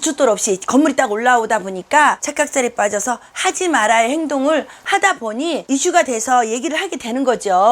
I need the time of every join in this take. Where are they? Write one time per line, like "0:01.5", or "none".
0:02.2